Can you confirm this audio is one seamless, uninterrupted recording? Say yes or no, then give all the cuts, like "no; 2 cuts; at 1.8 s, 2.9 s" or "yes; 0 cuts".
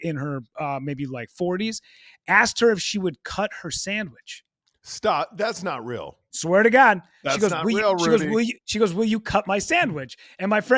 yes; 0 cuts